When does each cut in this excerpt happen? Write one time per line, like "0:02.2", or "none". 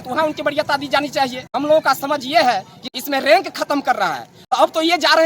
0:01.5
0:02.9
0:04.3